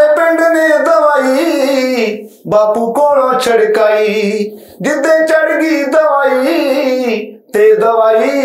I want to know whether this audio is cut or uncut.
uncut